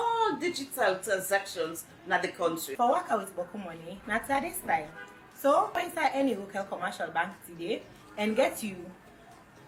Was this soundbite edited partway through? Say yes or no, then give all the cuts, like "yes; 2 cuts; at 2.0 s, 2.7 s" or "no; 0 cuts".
no; 0 cuts